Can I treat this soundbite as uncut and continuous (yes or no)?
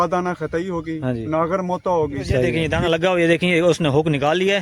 no